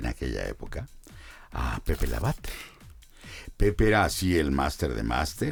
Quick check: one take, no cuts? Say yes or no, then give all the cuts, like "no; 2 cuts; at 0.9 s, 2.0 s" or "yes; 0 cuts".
yes; 0 cuts